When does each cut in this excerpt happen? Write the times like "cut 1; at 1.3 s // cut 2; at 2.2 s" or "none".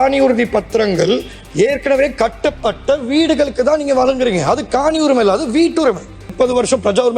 cut 1; at 6.2 s